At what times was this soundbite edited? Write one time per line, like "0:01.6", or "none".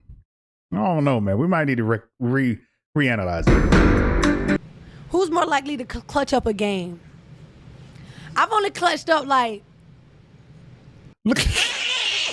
0:04.6
0:11.0